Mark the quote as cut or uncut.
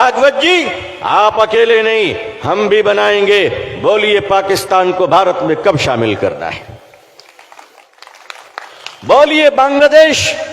cut